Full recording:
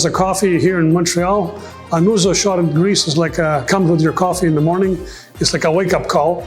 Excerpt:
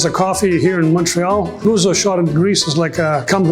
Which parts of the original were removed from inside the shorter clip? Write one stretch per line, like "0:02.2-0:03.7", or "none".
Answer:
0:01.6-0:02.0